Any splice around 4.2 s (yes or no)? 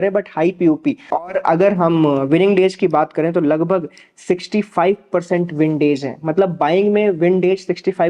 no